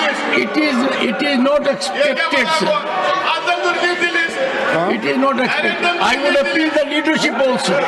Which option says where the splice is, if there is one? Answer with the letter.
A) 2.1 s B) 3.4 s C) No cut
C